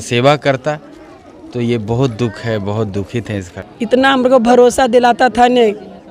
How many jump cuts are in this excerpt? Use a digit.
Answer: 1